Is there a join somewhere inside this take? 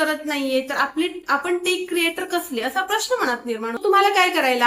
yes; 1 cut; at 3.8 s

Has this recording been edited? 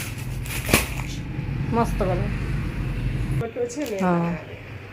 yes; 1 cut; at 3.4 s

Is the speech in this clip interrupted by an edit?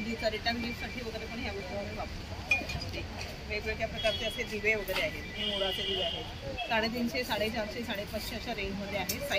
no; 0 cuts

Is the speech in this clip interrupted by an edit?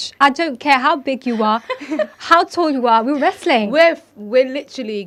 no; 0 cuts

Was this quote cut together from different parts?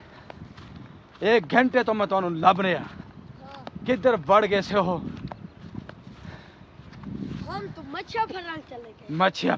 no; 0 cuts

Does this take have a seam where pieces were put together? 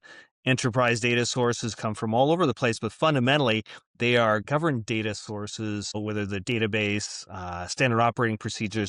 yes; 2 cuts; at 4.4 s, 6.0 s

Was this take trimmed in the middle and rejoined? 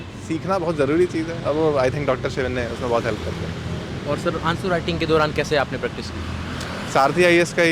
no; 0 cuts

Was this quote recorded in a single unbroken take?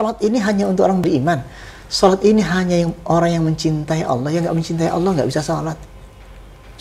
no; 1 cut; at 1.0 s

